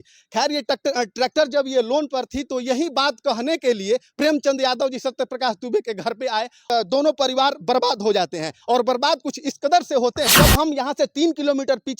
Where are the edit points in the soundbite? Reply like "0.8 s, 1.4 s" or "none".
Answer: 6.7 s, 10.3 s